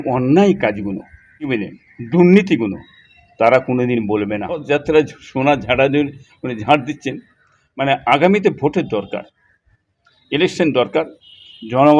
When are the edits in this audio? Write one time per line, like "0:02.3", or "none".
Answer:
0:01.5
0:04.6